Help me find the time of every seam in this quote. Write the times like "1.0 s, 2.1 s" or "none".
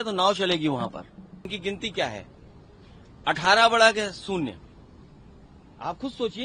1.5 s